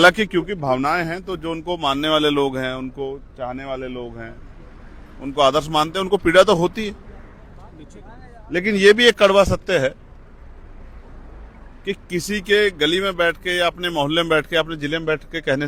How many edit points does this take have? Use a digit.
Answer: 0